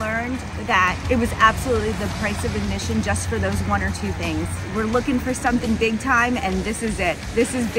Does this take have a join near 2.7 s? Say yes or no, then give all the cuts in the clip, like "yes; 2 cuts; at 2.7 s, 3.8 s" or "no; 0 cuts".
no; 2 cuts; at 1.0 s, 4.6 s